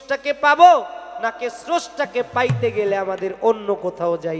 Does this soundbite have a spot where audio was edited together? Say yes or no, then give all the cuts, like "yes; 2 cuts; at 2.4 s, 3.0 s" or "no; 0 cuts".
no; 0 cuts